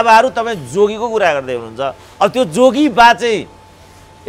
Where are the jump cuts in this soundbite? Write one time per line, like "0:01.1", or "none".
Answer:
none

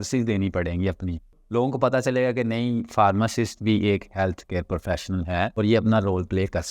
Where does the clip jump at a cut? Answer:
0:01.3
0:05.5

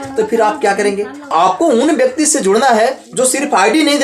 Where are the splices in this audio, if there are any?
0:01.3

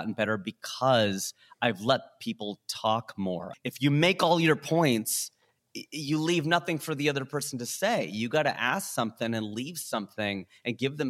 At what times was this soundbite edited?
0:03.5

